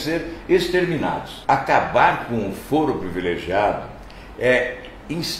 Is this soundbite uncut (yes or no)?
no